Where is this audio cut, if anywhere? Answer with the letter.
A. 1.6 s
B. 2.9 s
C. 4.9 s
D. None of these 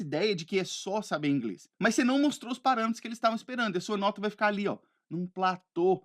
A